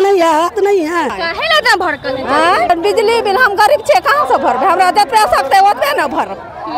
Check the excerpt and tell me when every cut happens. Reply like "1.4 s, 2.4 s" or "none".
1.2 s, 2.7 s